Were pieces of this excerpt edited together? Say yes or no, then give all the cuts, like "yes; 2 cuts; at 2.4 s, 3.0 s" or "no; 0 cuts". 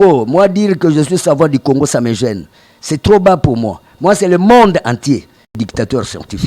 yes; 1 cut; at 5.6 s